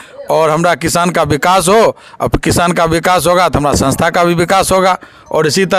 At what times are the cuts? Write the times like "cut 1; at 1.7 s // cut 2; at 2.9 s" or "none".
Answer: none